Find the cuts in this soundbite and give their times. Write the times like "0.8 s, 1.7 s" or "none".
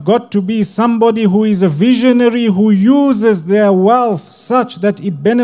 none